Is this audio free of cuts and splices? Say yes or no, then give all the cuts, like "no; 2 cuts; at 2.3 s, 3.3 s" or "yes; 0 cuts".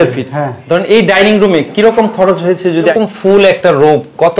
no; 1 cut; at 2.9 s